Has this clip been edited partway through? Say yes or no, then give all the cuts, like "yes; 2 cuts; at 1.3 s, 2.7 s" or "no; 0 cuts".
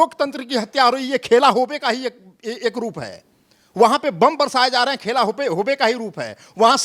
no; 0 cuts